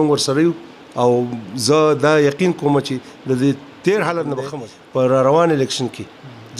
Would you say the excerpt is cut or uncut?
cut